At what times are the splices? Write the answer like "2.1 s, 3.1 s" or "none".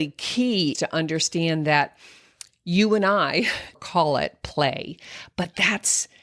0.7 s, 3.8 s